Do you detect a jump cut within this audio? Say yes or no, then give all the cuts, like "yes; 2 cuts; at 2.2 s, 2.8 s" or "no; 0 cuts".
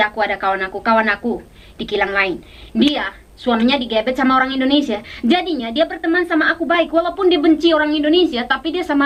no; 0 cuts